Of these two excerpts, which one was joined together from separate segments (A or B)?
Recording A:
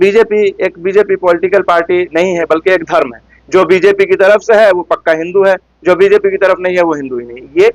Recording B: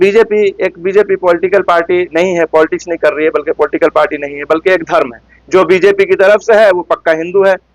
A